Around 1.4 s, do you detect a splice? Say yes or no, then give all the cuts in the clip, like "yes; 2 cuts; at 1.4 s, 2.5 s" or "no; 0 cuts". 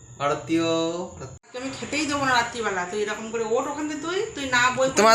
yes; 1 cut; at 1.4 s